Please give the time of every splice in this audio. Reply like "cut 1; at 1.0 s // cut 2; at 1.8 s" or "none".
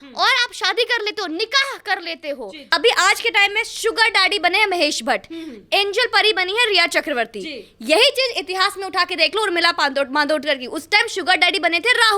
cut 1; at 2.6 s

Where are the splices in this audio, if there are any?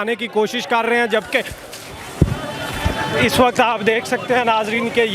none

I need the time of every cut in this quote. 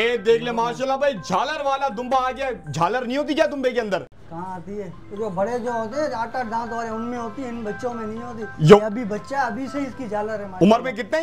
none

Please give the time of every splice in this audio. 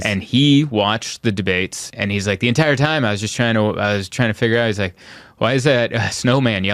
cut 1; at 1.9 s

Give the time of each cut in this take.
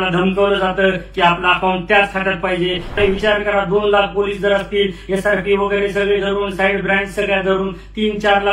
cut 1; at 3.0 s

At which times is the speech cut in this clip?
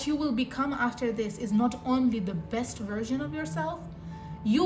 none

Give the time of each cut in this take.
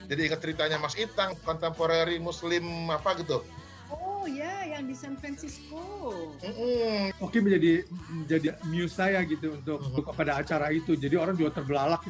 cut 1; at 1.3 s // cut 2; at 7.1 s // cut 3; at 8.5 s // cut 4; at 10.0 s

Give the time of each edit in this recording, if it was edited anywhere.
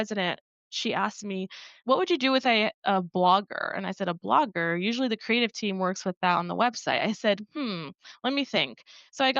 cut 1; at 1.7 s

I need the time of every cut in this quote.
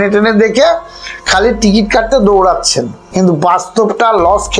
cut 1; at 3.0 s

